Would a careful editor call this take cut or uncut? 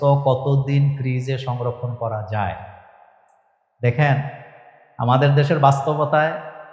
uncut